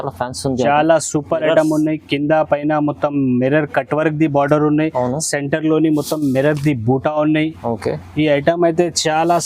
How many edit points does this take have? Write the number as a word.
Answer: zero